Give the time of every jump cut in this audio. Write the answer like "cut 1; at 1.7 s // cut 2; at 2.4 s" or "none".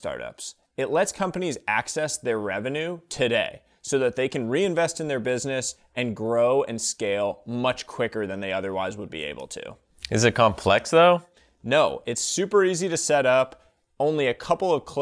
none